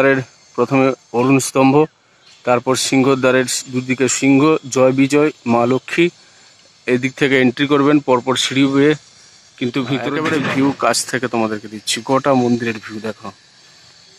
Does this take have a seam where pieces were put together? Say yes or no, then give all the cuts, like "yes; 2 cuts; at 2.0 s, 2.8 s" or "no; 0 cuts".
yes; 1 cut; at 10.2 s